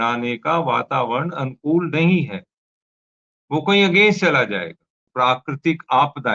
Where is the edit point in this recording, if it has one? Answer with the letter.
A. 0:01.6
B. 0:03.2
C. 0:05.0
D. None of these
C